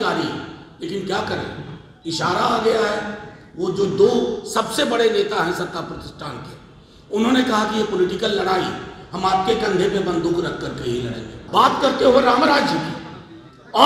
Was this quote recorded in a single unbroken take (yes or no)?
no